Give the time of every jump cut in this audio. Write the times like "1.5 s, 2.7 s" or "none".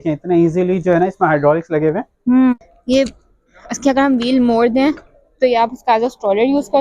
2.5 s